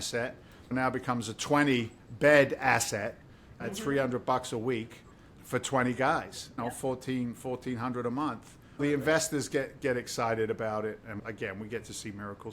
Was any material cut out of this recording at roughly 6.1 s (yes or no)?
no